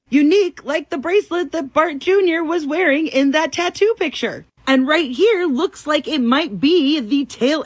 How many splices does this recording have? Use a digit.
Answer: 0